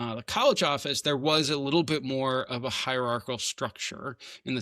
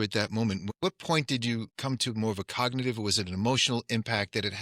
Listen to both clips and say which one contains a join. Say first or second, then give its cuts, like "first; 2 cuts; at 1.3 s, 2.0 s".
second; 1 cut; at 1.7 s